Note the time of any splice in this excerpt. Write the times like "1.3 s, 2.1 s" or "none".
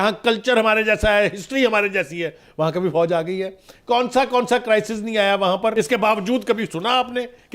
5.7 s